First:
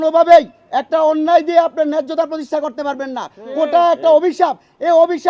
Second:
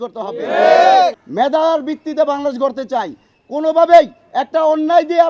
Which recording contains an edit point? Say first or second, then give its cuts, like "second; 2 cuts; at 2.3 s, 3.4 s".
second; 1 cut; at 1.2 s